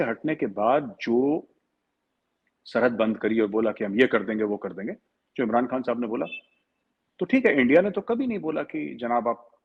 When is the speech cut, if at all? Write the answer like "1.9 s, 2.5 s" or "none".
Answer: none